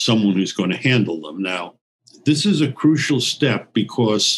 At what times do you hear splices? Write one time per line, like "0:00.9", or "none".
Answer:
0:02.0